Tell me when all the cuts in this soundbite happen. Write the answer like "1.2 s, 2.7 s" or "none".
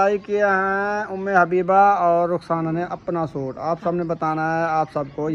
none